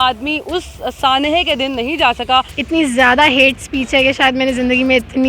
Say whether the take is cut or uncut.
cut